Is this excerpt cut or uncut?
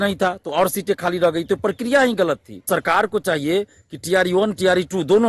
cut